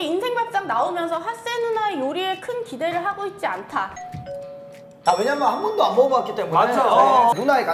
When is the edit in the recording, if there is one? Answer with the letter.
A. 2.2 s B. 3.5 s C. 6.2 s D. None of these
D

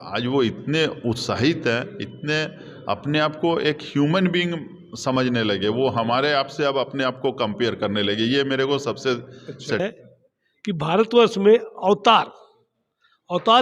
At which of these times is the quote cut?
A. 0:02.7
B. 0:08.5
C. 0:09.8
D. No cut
C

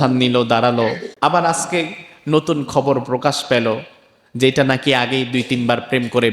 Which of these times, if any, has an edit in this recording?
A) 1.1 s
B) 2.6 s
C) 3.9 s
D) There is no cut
A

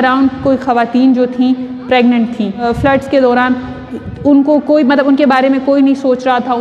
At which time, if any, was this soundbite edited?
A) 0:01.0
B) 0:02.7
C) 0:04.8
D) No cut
B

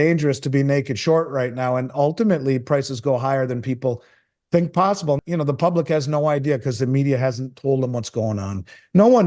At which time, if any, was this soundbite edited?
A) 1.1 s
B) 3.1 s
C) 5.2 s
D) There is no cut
C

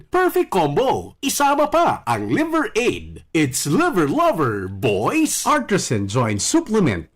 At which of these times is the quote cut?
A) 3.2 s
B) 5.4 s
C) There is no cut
B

